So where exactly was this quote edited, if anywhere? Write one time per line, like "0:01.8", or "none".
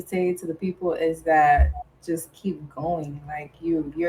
none